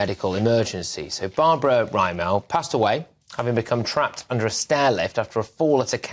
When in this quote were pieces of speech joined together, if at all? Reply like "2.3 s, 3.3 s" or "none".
none